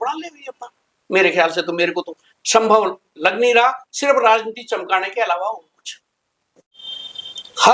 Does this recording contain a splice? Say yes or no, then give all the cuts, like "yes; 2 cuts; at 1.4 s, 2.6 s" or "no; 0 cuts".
yes; 1 cut; at 6.8 s